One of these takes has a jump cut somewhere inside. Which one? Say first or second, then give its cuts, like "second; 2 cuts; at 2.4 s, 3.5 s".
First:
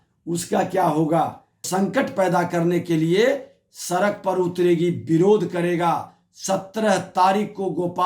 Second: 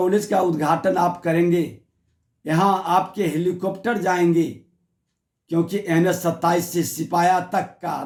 first; 1 cut; at 1.6 s